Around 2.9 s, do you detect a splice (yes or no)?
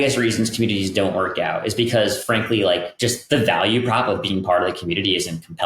yes